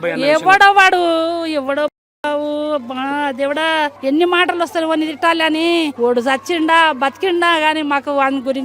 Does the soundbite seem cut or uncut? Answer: cut